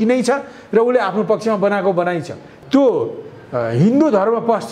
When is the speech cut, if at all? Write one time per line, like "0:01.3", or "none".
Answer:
0:02.5